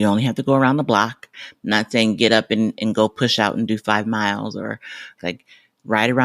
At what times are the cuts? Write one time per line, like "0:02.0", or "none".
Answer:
0:01.3
0:05.2